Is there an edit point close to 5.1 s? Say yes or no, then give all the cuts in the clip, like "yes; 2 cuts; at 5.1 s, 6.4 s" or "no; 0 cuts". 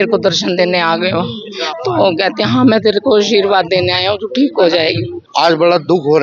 yes; 1 cut; at 5.1 s